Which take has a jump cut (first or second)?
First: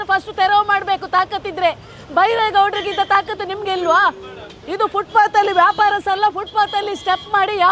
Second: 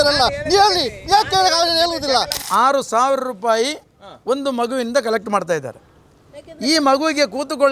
second